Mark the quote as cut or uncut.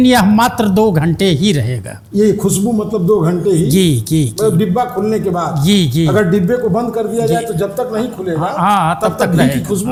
uncut